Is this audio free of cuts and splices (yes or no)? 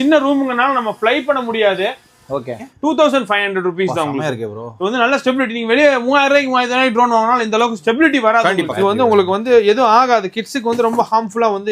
no